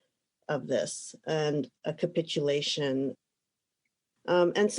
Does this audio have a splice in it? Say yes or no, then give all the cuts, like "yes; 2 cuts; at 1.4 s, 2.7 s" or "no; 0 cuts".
yes; 1 cut; at 3.7 s